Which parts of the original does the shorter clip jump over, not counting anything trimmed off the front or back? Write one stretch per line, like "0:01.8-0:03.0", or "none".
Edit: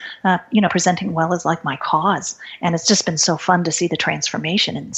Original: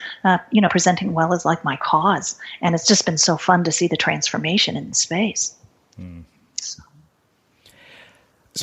none